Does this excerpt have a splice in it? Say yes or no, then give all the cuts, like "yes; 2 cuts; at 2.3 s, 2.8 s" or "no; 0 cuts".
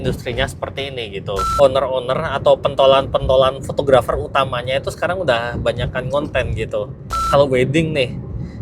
yes; 2 cuts; at 1.5 s, 7.2 s